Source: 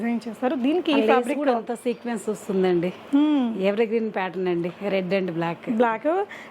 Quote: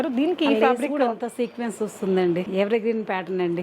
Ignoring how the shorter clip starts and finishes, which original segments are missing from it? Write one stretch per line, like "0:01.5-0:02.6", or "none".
0:03.0-0:03.6